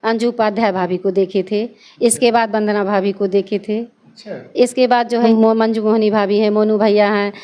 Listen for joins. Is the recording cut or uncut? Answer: cut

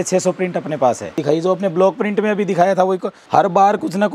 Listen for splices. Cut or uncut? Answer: cut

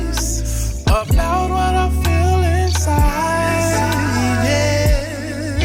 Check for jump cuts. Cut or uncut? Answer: uncut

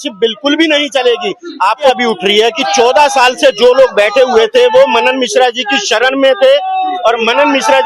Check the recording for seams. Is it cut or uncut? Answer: cut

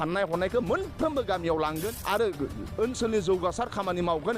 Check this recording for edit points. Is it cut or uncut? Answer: cut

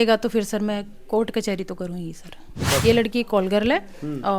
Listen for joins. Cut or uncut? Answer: cut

